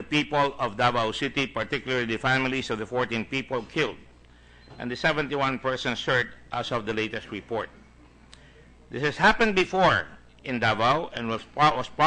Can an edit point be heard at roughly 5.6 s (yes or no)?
no